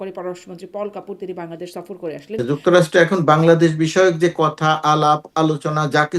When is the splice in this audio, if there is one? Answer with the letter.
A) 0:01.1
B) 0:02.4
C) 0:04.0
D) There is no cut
B